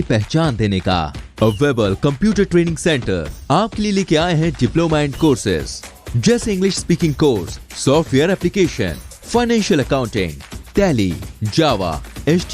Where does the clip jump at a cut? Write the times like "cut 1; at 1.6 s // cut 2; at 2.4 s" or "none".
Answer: none

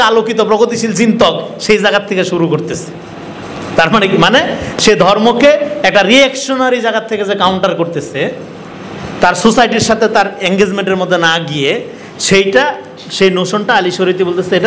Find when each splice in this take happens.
none

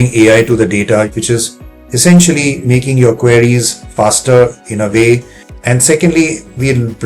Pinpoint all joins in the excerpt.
cut 1; at 1.1 s // cut 2; at 5.5 s

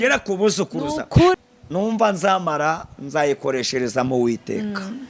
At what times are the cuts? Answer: cut 1; at 1.4 s

